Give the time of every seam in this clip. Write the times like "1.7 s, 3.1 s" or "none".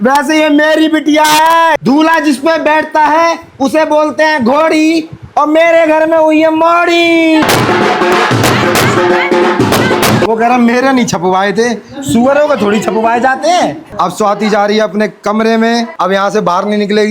1.8 s, 7.4 s, 10.3 s, 13.8 s